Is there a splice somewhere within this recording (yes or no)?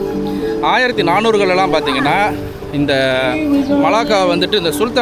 no